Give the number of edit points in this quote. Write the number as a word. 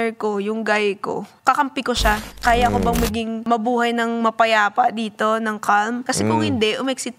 four